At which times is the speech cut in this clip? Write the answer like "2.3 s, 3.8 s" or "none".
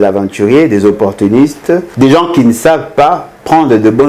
1.9 s